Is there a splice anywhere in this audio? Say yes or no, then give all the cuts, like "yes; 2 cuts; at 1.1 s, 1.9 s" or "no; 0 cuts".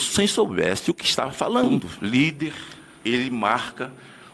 yes; 1 cut; at 1.9 s